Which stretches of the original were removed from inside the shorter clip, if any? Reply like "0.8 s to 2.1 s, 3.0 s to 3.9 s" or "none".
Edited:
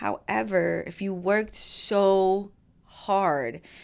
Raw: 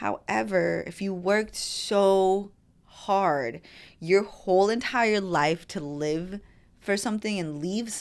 none